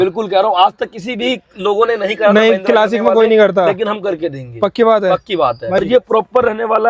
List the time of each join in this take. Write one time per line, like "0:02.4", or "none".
0:05.8